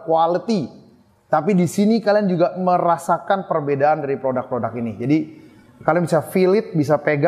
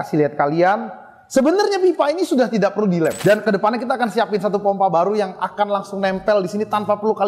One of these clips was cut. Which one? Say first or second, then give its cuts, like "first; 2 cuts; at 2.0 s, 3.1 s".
second; 1 cut; at 3.2 s